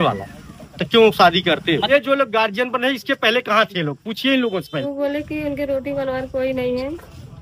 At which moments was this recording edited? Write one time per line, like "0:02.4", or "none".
0:01.9
0:04.8